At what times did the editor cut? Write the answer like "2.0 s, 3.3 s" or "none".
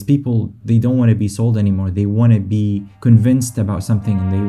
none